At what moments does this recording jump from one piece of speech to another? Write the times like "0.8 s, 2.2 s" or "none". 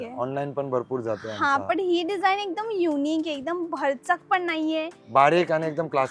none